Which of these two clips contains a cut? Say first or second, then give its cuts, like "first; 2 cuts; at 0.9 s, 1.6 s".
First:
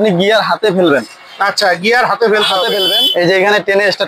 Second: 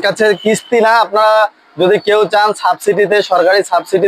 first; 1 cut; at 2.8 s